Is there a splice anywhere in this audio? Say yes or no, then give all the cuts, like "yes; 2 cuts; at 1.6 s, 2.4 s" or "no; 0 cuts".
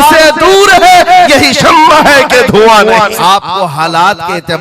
yes; 1 cut; at 3.1 s